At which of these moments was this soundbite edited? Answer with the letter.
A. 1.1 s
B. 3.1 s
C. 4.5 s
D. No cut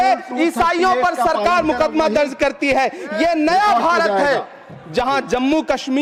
D